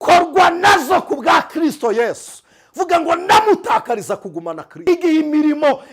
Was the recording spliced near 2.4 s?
no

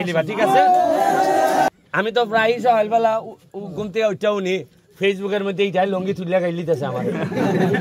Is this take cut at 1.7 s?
yes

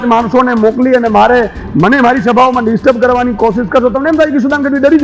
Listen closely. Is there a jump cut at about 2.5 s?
no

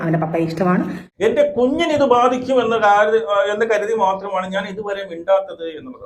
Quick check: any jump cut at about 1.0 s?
yes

